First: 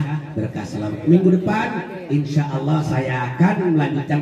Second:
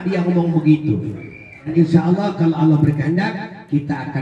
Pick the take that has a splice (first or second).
second